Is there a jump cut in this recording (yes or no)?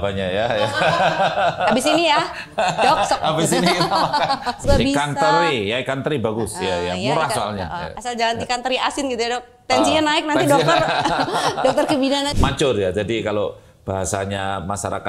yes